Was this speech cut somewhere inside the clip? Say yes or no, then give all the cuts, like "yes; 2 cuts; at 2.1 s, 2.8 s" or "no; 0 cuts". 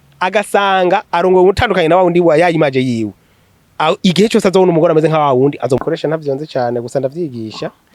yes; 1 cut; at 5.8 s